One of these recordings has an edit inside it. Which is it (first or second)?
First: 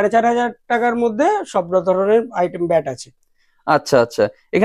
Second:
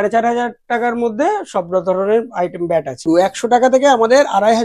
second